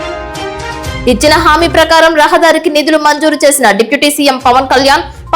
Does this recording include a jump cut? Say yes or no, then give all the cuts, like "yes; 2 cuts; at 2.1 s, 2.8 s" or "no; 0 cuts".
yes; 1 cut; at 1.0 s